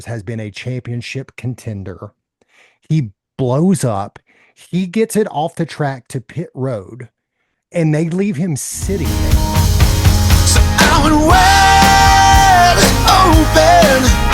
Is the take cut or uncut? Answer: cut